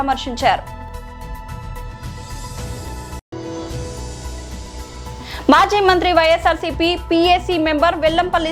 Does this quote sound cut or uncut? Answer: cut